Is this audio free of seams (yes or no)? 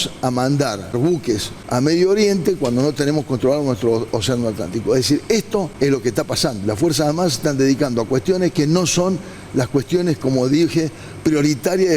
no